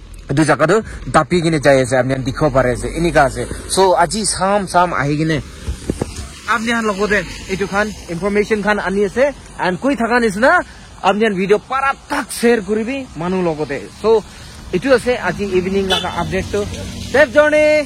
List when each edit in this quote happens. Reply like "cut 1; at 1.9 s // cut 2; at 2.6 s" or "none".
none